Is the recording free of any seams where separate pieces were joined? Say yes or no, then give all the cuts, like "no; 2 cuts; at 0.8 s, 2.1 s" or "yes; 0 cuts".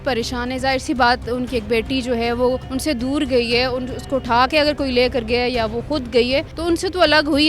no; 2 cuts; at 2.7 s, 6.5 s